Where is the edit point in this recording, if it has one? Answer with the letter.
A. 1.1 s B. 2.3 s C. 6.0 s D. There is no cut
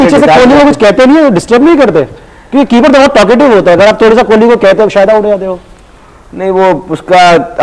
D